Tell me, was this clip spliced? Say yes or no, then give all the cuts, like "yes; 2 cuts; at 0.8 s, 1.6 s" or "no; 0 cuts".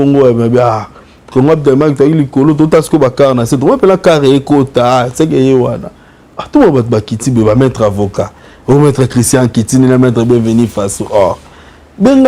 no; 0 cuts